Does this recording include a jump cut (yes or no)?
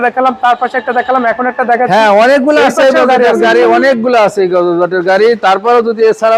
no